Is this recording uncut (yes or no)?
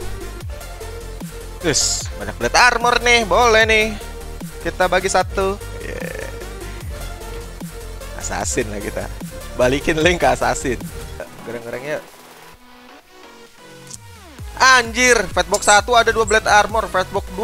no